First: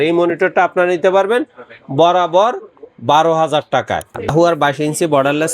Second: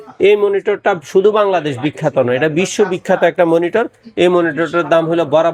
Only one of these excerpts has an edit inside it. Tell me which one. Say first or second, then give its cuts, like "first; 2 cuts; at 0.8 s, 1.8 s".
first; 1 cut; at 4.2 s